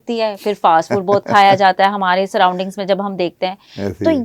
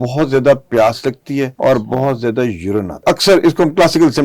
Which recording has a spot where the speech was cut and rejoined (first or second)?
second